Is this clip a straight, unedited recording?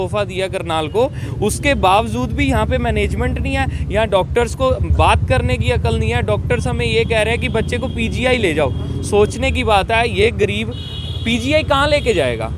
yes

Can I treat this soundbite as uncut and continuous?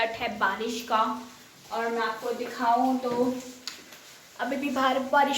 yes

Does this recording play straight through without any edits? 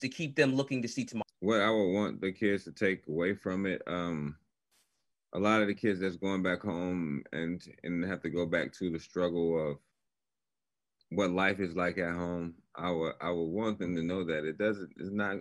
no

